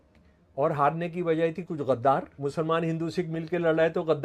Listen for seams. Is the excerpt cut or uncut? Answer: cut